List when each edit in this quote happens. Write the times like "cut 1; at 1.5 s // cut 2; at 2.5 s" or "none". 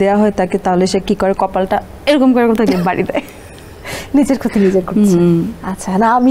none